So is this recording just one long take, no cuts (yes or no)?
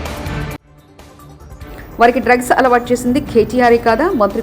no